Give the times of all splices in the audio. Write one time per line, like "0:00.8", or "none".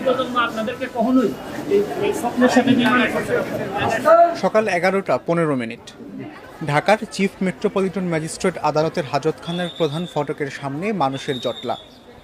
none